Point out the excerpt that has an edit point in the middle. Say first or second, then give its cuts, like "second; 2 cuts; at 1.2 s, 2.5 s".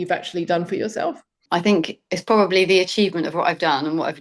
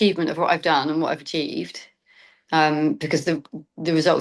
first; 1 cut; at 1.4 s